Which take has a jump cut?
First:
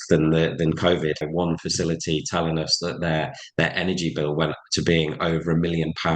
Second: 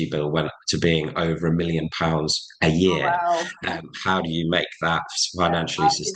first; 1 cut; at 1.3 s

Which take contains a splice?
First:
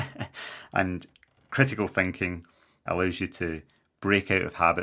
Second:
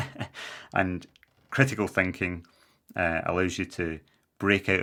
first; 1 cut; at 2.8 s

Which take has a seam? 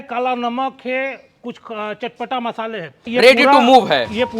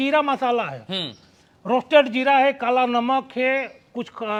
first; 1 cut; at 3.0 s

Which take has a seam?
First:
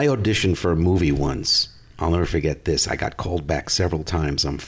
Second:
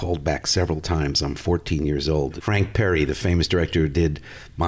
second; 1 cut; at 2.4 s

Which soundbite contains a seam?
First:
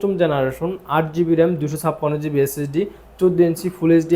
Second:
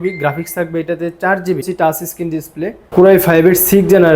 second; 2 cuts; at 1.6 s, 2.9 s

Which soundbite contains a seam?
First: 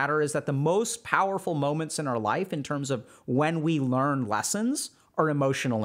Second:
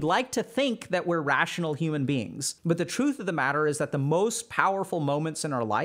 second; 1 cut; at 2.4 s

